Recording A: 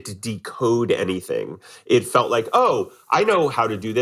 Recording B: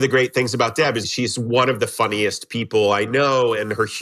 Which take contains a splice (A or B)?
B